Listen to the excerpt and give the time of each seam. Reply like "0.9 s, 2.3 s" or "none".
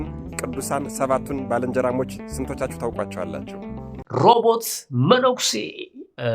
3.9 s